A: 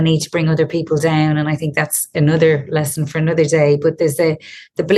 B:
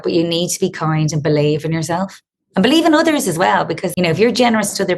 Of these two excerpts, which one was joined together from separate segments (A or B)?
B